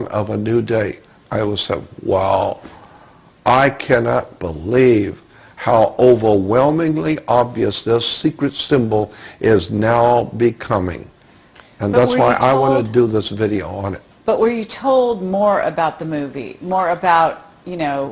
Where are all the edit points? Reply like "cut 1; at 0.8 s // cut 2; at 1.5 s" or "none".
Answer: cut 1; at 2.8 s

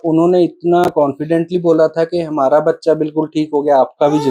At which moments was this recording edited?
none

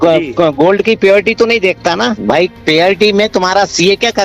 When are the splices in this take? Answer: cut 1; at 2.2 s

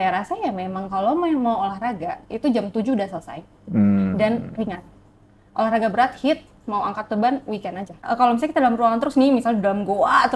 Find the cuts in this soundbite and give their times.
cut 1; at 8.0 s

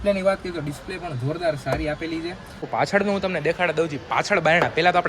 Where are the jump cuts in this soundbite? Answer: cut 1; at 2.5 s

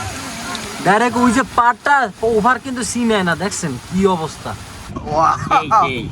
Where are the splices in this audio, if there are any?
cut 1; at 4.9 s

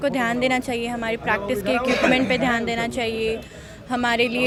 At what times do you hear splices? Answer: none

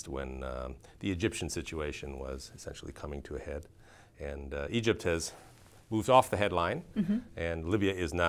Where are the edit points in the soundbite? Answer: cut 1; at 6.5 s

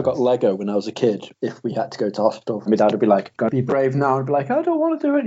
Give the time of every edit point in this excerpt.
cut 1; at 1.3 s // cut 2; at 2.6 s // cut 3; at 3.3 s

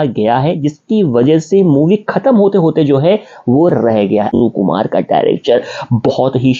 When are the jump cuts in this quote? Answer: cut 1; at 4.3 s

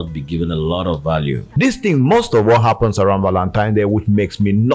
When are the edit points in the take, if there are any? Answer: cut 1; at 1.4 s

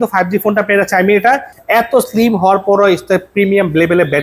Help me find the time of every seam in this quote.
cut 1; at 1.5 s

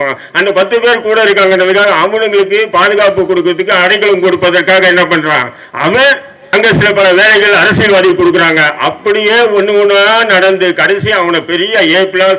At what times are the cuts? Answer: cut 1; at 6.3 s

